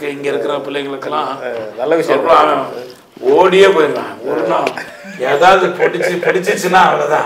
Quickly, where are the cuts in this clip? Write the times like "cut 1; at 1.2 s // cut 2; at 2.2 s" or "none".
none